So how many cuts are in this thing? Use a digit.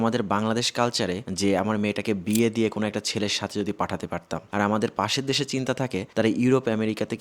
2